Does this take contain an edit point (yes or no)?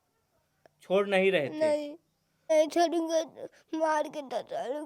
yes